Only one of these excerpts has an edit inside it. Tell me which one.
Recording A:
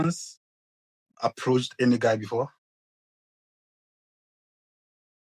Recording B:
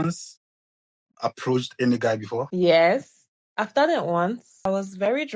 B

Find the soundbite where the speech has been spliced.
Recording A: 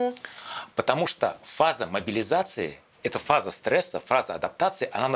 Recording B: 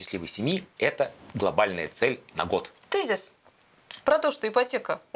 B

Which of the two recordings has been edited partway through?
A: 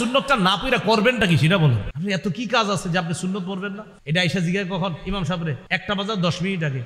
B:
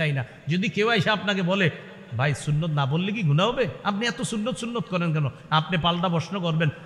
A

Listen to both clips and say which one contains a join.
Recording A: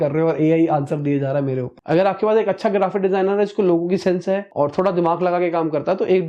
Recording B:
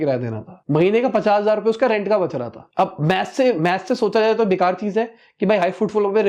A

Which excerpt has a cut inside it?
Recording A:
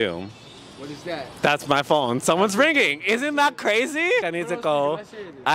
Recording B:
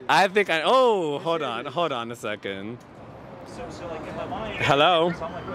A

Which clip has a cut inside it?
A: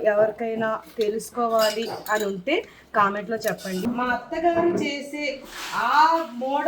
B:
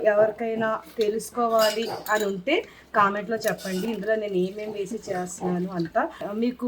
A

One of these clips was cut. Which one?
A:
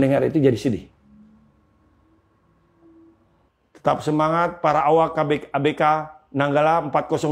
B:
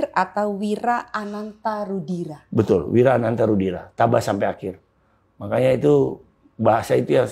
A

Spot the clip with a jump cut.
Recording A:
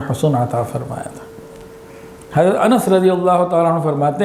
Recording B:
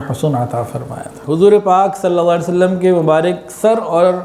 B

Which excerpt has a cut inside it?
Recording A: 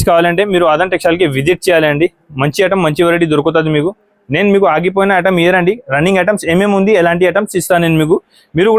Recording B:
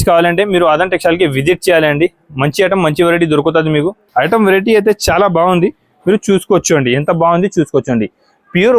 B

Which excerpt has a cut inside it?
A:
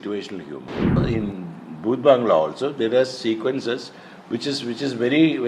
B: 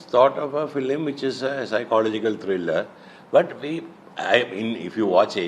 A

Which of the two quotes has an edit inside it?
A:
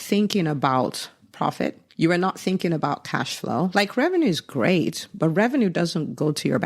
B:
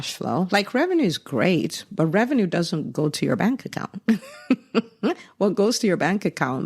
A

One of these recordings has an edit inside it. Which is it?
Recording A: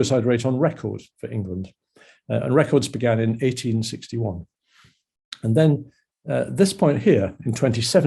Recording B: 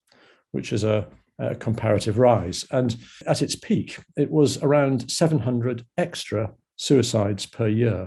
B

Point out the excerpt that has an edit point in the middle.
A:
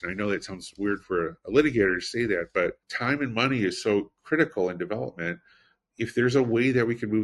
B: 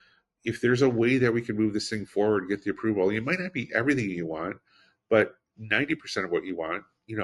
A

